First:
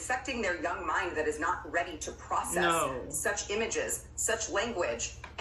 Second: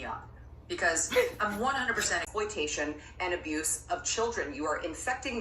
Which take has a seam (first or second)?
second